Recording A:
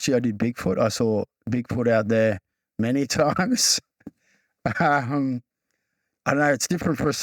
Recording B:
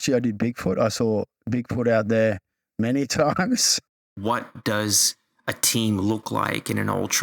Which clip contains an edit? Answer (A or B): B